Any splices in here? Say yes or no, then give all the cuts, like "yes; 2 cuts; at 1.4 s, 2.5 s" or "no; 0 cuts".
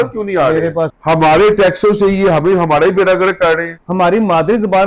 yes; 2 cuts; at 1.0 s, 3.8 s